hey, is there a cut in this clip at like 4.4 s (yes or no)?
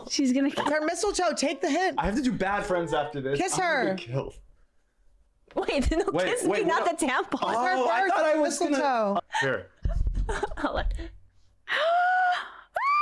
no